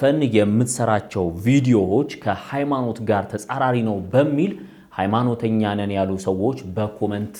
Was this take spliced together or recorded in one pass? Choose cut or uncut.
uncut